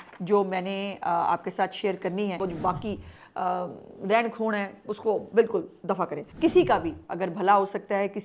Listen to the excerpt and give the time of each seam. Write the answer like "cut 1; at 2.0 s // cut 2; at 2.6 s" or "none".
cut 1; at 2.4 s // cut 2; at 6.2 s